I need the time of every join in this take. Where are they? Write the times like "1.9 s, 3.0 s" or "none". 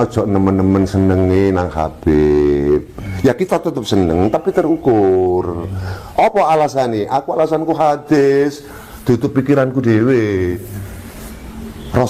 none